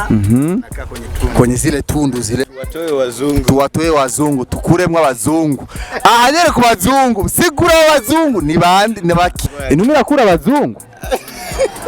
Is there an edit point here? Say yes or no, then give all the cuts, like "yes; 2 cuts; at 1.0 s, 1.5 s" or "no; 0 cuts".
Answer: yes; 2 cuts; at 2.4 s, 9.5 s